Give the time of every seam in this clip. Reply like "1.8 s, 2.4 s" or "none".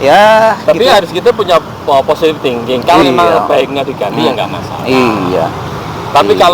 3.0 s